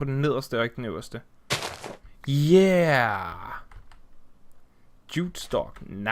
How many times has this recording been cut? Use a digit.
0